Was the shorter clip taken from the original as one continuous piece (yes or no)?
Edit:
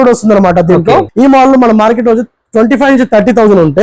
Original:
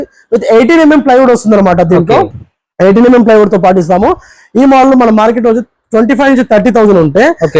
no